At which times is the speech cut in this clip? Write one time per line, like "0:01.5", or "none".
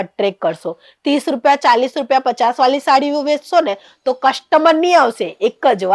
none